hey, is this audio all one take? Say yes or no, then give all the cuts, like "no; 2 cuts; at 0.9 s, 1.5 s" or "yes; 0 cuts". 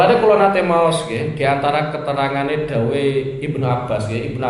yes; 0 cuts